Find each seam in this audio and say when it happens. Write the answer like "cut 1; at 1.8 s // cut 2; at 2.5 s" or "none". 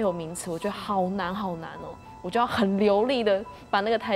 cut 1; at 2.0 s